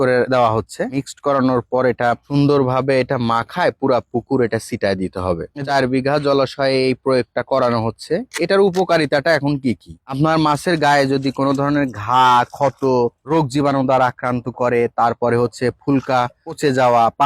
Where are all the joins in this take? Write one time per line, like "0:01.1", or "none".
0:05.5